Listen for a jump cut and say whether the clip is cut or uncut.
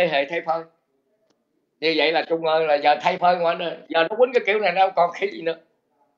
uncut